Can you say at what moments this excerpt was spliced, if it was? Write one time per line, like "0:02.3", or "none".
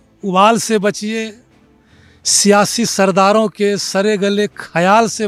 none

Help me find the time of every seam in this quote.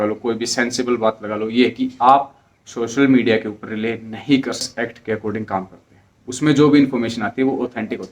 0:04.8

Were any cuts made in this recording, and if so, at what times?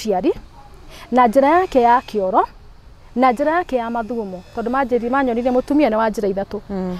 none

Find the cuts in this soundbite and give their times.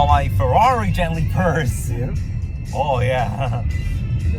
none

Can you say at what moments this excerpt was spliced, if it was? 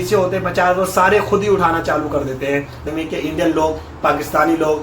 0:02.8

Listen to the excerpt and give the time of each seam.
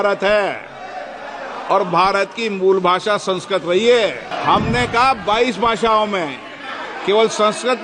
0:04.3

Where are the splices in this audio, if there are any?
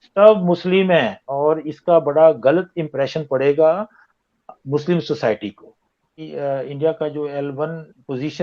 0:06.2

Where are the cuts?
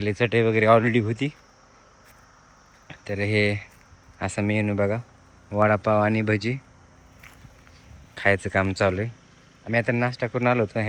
none

